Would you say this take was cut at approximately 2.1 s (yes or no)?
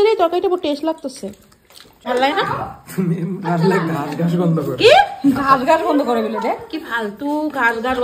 yes